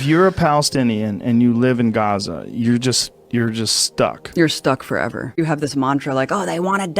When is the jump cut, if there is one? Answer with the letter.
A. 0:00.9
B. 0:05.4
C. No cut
B